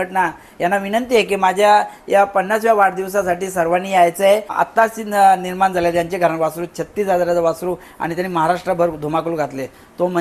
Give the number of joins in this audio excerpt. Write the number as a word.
one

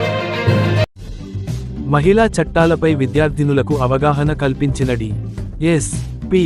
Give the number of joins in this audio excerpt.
one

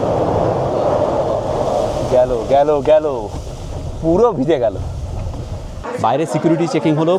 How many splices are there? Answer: one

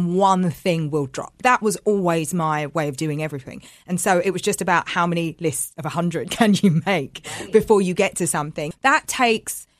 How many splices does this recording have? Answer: two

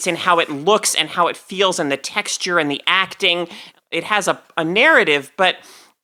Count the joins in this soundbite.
one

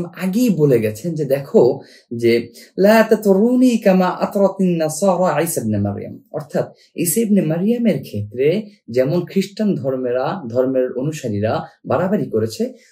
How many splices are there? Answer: zero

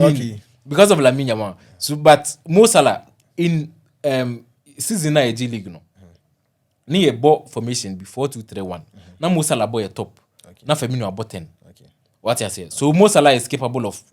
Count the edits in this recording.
zero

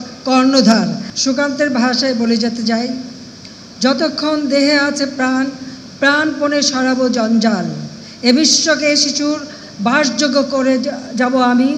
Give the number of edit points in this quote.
one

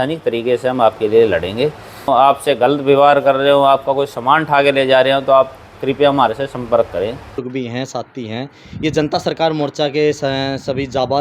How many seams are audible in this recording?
two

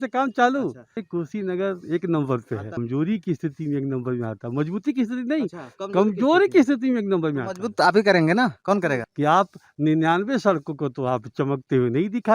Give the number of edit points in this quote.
two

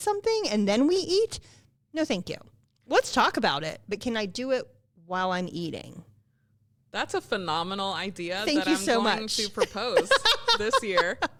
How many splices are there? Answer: zero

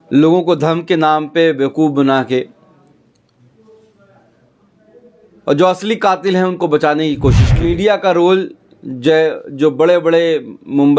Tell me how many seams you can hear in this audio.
one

